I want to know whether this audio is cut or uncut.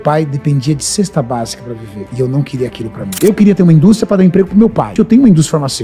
cut